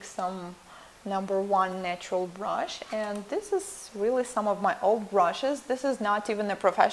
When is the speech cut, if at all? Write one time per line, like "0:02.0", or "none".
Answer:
0:03.9